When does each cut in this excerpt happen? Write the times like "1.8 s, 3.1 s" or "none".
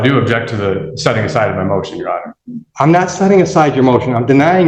none